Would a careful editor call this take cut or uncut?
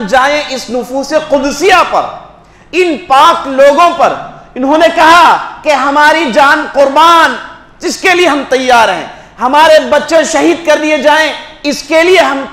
uncut